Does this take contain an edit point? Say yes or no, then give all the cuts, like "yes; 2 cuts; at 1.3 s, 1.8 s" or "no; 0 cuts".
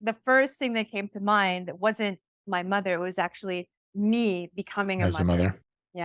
yes; 2 cuts; at 2.3 s, 3.8 s